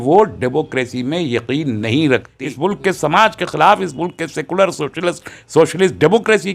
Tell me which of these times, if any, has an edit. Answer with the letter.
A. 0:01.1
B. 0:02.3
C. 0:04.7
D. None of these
B